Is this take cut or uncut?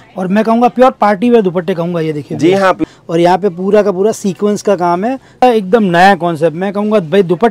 cut